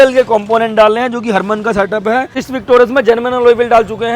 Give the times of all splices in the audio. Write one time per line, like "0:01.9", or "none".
0:02.4